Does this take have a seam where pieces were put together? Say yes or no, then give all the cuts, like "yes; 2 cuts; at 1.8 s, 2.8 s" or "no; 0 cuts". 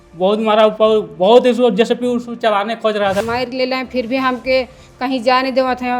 yes; 1 cut; at 3.2 s